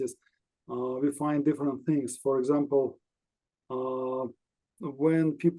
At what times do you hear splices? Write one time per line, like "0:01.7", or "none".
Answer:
none